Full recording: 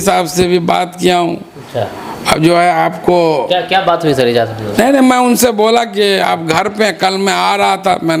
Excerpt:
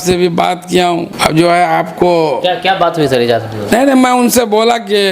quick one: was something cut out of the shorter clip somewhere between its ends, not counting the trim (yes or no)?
yes